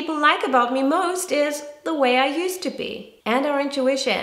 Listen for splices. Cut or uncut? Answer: cut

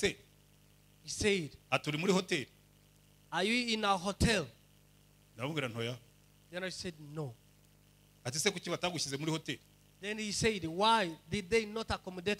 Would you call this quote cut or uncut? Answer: uncut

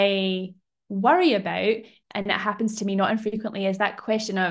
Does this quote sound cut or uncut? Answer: cut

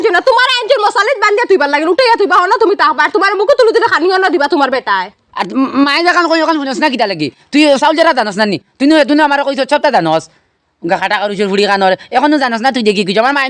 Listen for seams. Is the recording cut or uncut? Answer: uncut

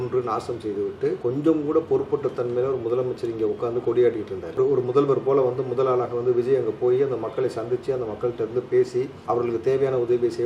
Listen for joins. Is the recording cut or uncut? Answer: cut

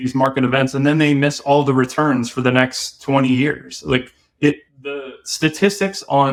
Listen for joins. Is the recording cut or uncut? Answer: uncut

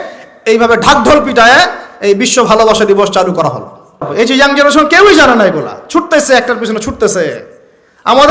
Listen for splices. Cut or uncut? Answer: cut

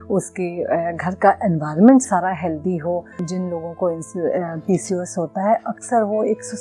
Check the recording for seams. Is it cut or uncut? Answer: cut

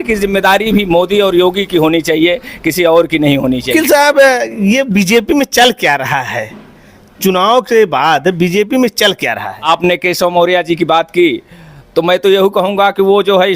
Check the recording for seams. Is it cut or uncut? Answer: cut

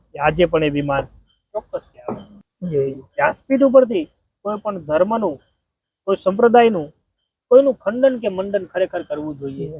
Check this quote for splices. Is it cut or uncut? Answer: cut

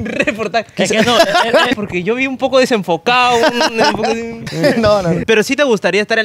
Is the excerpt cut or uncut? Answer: cut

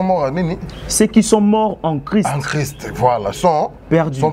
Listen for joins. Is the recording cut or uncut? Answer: uncut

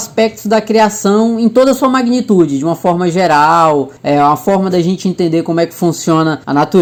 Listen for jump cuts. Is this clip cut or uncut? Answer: uncut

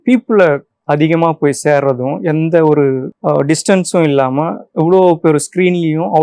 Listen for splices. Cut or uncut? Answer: cut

